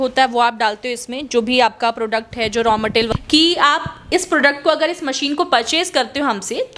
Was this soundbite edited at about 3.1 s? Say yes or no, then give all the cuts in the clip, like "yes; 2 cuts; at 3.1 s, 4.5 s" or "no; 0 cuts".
yes; 1 cut; at 3.1 s